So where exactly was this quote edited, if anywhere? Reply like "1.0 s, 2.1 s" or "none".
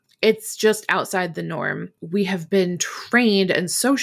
1.9 s